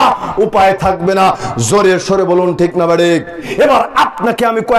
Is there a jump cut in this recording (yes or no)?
yes